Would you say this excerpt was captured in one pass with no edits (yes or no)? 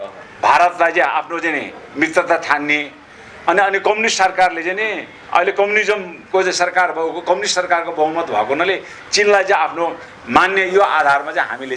yes